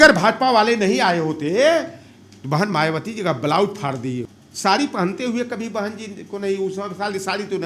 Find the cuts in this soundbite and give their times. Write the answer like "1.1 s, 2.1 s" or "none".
4.4 s